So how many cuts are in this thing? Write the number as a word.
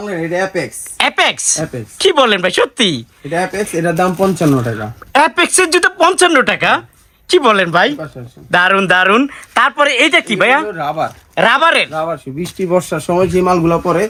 zero